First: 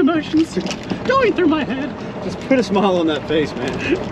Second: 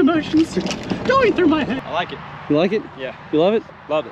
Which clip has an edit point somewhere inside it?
second; 1 cut; at 1.8 s

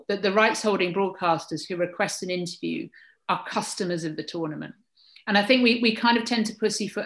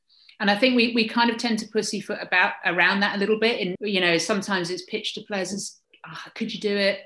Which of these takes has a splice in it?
second; 1 cut; at 3.8 s

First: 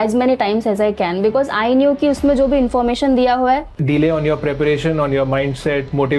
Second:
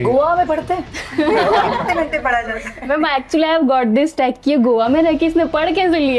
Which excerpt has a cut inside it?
first; 1 cut; at 3.7 s

